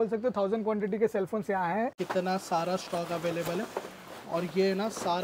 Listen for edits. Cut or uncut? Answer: cut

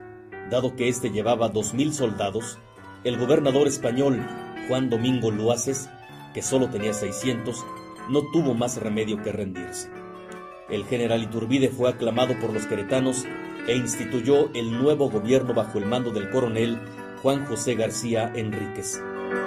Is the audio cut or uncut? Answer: uncut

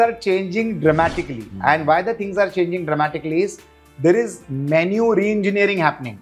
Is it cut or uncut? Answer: uncut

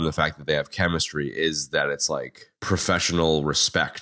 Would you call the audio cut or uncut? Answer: uncut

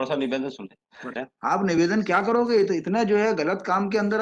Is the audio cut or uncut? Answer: cut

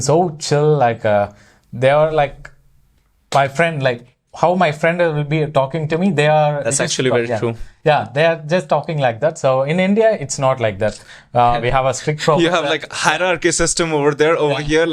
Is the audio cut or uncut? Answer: uncut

